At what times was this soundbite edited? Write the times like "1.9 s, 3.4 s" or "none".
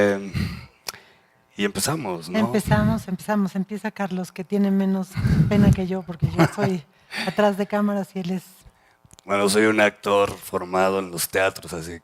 9.6 s